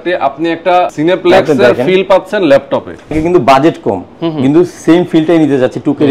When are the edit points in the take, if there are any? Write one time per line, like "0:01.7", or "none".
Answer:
0:00.9
0:03.1